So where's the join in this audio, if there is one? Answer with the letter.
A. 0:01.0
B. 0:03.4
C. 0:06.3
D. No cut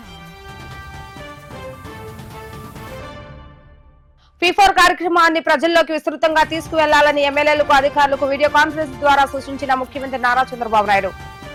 D